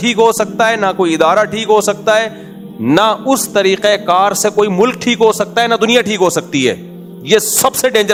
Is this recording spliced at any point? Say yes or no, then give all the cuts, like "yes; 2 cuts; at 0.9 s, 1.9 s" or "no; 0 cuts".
no; 0 cuts